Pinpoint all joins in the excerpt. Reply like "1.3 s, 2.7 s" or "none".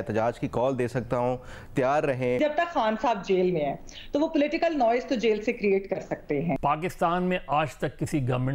2.4 s, 6.6 s